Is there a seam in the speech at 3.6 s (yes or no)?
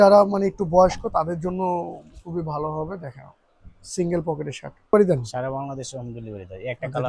no